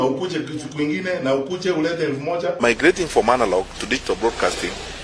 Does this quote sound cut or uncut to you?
cut